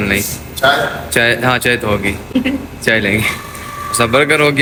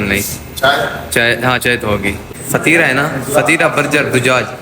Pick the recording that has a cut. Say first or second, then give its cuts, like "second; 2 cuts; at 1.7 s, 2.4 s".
second; 1 cut; at 2.3 s